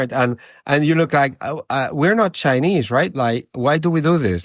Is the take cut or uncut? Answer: uncut